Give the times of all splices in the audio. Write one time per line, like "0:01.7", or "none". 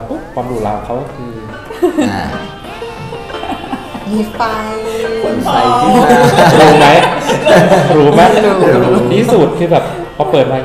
none